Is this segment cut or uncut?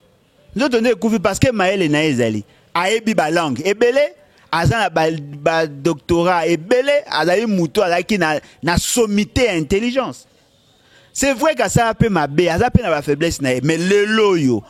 uncut